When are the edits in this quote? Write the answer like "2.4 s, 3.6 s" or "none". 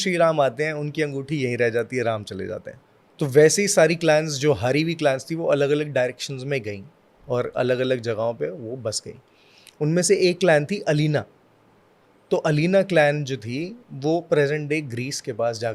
2.7 s